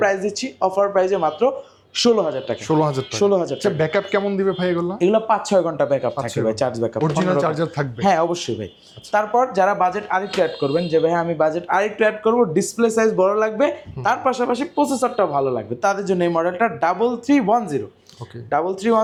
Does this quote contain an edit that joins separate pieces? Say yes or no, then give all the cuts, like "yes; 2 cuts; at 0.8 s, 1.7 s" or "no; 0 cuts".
no; 0 cuts